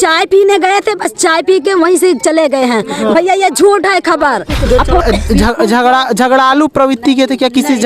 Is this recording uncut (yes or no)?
no